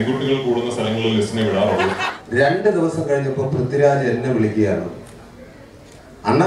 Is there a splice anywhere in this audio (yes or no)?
yes